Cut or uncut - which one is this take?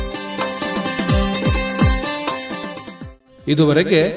uncut